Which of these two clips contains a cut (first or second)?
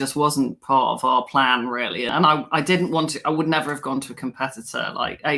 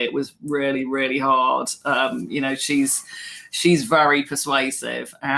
first